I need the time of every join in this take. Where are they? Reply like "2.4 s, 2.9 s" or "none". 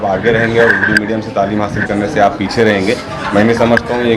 none